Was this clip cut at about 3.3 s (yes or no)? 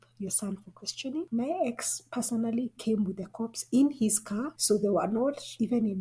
no